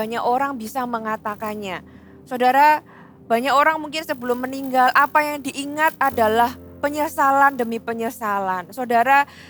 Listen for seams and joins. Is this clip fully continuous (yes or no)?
yes